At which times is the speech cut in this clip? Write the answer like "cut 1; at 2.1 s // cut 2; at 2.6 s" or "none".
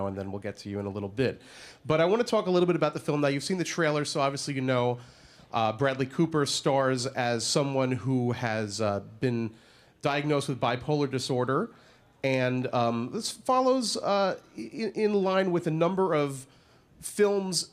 none

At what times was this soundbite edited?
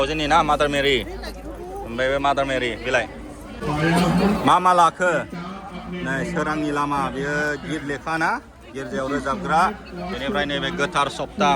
cut 1; at 3.5 s

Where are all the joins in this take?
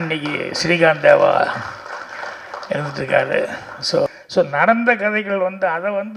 cut 1; at 4.1 s

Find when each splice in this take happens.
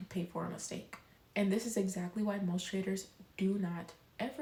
none

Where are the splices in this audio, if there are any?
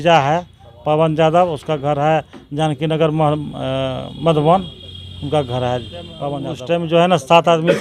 cut 1; at 6.4 s

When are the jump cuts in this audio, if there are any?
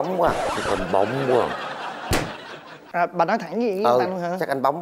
none

